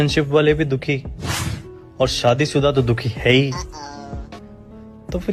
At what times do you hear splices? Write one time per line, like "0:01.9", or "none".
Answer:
none